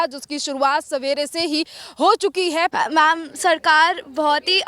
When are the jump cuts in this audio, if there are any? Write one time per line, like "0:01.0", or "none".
0:02.7